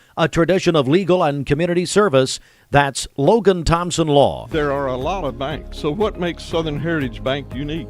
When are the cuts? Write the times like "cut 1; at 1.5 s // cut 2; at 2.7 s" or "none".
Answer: cut 1; at 4.4 s